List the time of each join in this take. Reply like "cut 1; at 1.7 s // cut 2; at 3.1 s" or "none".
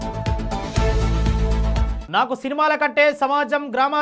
cut 1; at 1.9 s